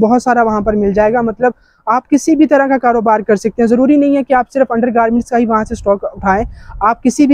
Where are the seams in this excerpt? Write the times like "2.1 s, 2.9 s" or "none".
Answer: none